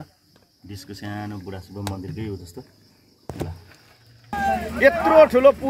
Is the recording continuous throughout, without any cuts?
no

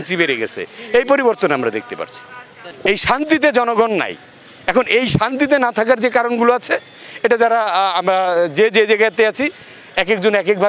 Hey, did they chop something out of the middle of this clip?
yes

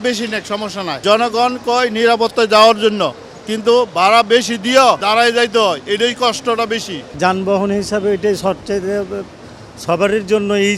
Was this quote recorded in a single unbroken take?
yes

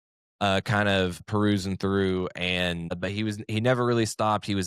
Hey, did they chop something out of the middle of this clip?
yes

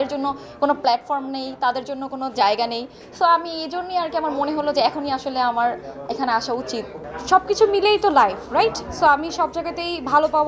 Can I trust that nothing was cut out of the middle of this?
yes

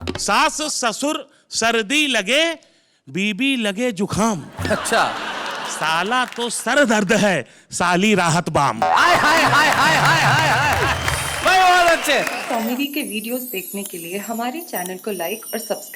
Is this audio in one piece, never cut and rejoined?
no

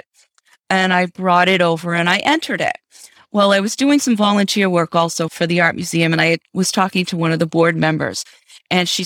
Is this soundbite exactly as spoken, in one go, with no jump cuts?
no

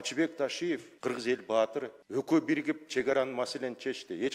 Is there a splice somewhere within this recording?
yes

